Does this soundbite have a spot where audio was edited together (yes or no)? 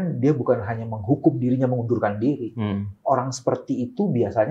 no